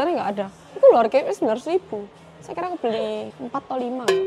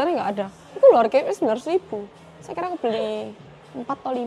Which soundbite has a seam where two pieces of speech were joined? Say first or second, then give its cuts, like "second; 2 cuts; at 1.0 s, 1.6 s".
first; 1 cut; at 3.3 s